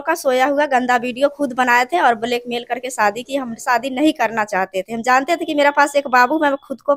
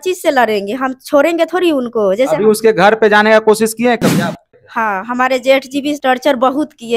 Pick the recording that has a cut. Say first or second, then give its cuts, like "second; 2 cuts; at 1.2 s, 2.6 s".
second; 2 cuts; at 4.4 s, 6.0 s